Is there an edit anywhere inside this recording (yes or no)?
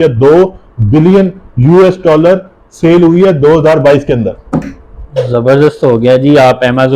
no